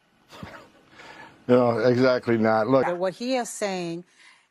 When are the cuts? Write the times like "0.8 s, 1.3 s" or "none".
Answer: 2.9 s